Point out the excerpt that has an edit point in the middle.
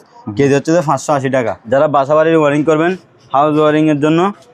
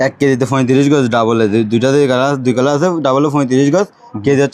first; 1 cut; at 1.6 s

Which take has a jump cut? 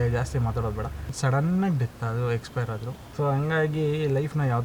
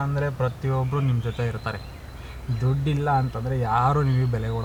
first; 2 cuts; at 1.1 s, 3.0 s

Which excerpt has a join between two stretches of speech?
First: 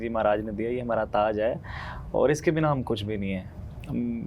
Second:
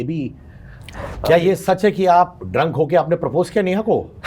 second; 1 cut; at 1.1 s

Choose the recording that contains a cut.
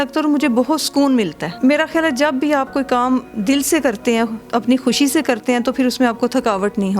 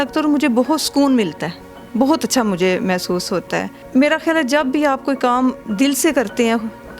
first; 2 cuts; at 1.4 s, 4.4 s

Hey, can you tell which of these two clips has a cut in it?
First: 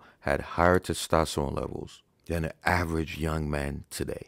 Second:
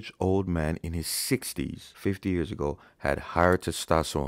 second; 1 cut; at 1.8 s

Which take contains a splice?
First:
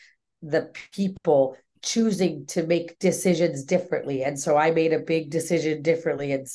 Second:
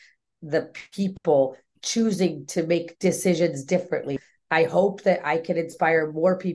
second; 1 cut; at 4.2 s

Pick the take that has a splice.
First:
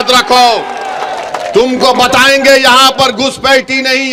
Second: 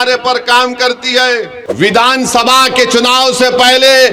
second; 1 cut; at 1.6 s

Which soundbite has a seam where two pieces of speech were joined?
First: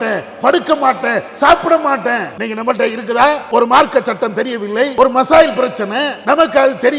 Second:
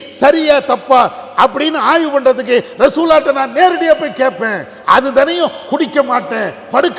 first; 4 cuts; at 2.3 s, 3.4 s, 4.9 s, 6.1 s

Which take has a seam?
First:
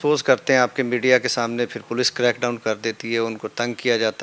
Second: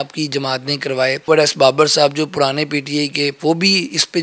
second; 2 cuts; at 1.2 s, 3.4 s

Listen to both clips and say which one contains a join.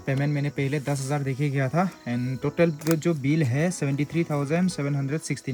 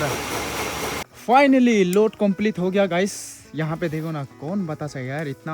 second; 1 cut; at 1.0 s

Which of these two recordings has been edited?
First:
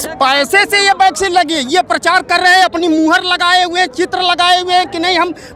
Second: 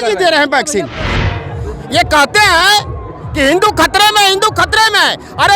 second; 1 cut; at 1.0 s

